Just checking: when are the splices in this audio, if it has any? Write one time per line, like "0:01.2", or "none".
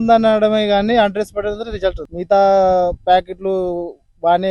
0:02.1